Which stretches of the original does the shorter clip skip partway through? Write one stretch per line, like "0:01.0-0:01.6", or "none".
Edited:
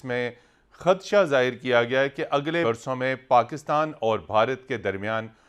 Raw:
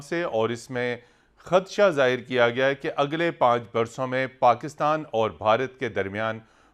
0:03.3-0:03.7